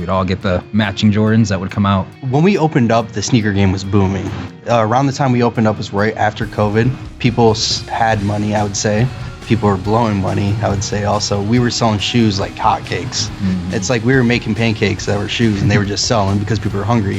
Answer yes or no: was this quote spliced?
yes